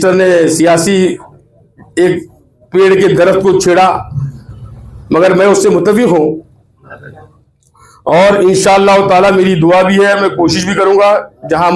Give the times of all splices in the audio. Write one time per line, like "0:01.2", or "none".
none